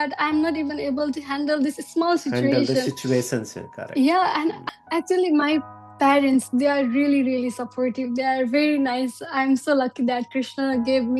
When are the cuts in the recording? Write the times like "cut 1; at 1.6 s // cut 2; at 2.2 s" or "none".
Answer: cut 1; at 4.6 s